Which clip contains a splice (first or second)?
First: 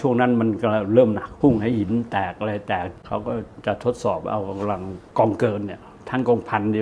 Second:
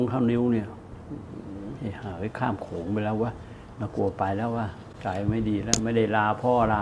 first